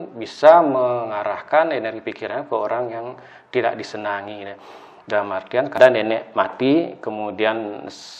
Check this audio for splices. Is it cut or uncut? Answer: cut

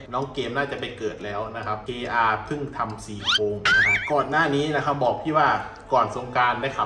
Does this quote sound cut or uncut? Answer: cut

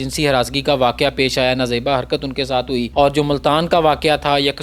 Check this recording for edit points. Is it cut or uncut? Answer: cut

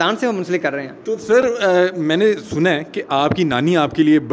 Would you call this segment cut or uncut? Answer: uncut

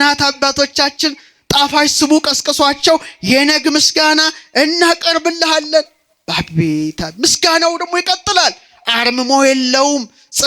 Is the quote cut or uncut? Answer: uncut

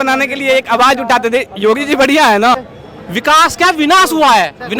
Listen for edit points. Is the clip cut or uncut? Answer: cut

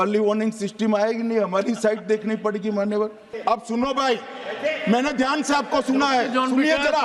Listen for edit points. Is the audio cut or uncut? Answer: cut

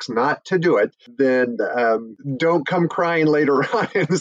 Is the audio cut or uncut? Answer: cut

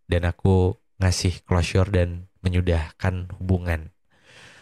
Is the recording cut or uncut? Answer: uncut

